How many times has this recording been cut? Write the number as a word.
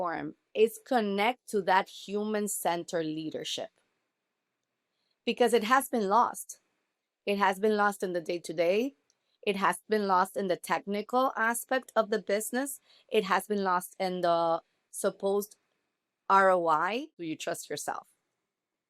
one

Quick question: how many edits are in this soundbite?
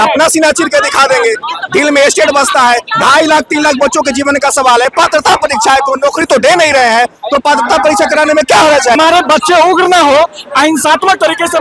one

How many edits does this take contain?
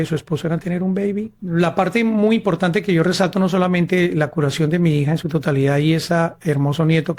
one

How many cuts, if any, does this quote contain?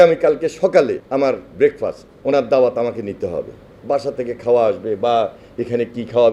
two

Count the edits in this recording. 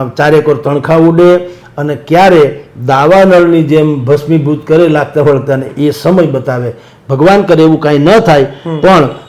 zero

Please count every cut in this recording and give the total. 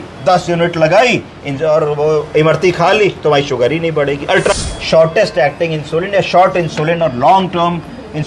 one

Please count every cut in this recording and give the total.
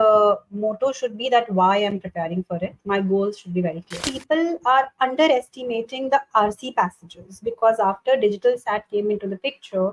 one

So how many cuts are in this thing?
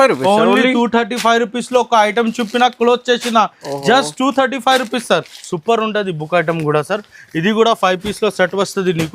one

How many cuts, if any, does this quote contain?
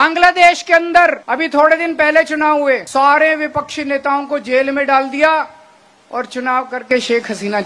two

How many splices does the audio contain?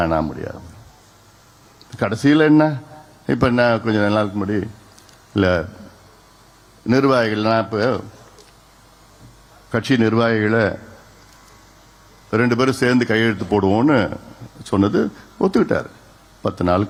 zero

